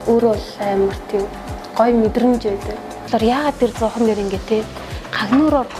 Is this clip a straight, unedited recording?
no; 1 cut; at 3.0 s

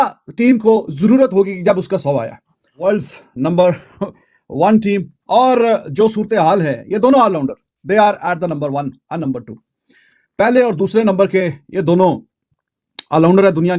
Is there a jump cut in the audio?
no; 0 cuts

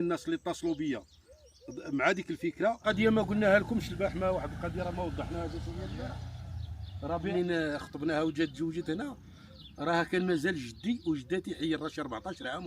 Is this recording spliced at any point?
yes; 2 cuts; at 2.9 s, 7.3 s

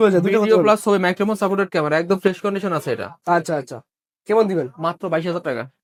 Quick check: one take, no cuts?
yes; 0 cuts

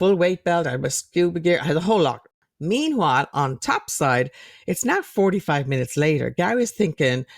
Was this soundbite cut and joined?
yes; 1 cut; at 2.3 s

